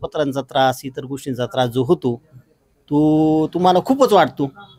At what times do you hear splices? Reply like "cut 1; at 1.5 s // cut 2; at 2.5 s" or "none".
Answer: none